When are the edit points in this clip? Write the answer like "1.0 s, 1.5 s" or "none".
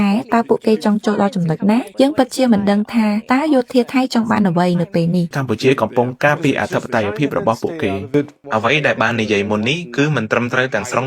1.9 s, 5.3 s, 8.4 s